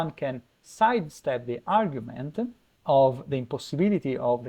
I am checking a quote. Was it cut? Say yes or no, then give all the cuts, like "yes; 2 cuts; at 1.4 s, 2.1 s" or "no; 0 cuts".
yes; 1 cut; at 2.7 s